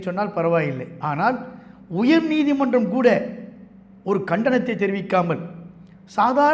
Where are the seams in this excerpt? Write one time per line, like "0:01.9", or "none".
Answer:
none